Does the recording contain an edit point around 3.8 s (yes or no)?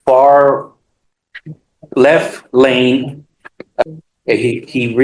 yes